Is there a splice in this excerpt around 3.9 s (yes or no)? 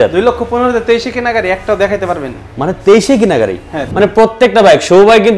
yes